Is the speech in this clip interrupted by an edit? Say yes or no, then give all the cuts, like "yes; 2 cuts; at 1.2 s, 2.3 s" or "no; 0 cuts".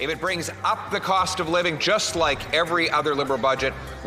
no; 0 cuts